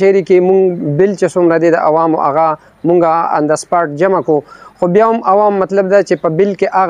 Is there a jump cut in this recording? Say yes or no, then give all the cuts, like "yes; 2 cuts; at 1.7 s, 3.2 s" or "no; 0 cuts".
no; 0 cuts